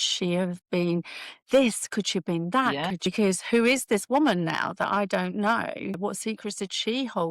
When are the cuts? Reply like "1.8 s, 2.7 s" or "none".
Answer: 3.0 s